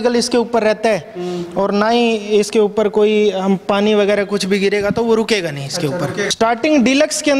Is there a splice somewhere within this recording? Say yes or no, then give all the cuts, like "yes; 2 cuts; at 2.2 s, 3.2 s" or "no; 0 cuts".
yes; 1 cut; at 6.2 s